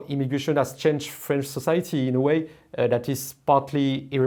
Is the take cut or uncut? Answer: uncut